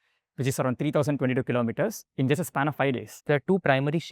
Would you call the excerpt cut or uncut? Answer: cut